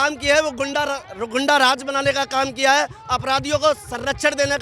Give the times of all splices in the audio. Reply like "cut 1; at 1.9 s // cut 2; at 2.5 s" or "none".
none